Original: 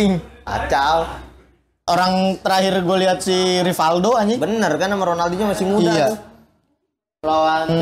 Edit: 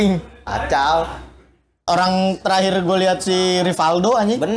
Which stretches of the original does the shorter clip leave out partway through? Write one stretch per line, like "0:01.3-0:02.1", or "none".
none